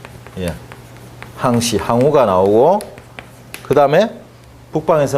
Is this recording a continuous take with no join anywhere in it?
no; 1 cut; at 3.8 s

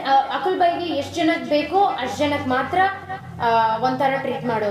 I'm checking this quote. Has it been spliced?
no; 0 cuts

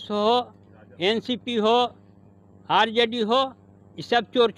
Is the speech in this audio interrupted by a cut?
no; 0 cuts

